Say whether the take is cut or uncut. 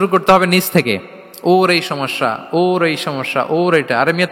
uncut